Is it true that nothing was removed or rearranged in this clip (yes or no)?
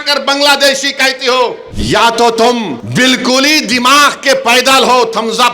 no